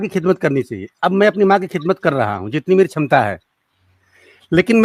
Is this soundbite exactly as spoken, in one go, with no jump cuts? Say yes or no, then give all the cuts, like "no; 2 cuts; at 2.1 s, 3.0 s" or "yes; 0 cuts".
yes; 0 cuts